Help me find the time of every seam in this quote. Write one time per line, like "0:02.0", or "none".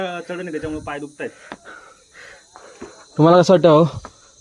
none